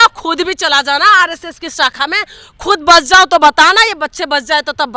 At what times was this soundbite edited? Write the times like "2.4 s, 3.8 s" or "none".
none